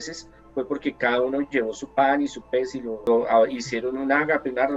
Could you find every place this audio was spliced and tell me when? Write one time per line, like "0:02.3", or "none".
0:02.9